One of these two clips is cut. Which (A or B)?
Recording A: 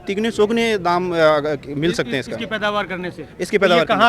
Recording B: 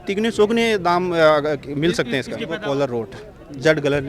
B